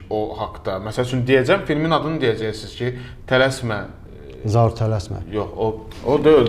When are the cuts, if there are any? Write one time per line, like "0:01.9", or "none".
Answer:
none